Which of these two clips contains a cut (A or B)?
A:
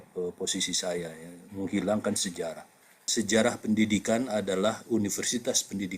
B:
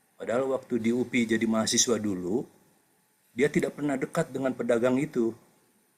A